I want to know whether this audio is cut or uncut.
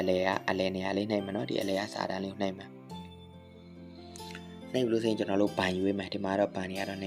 cut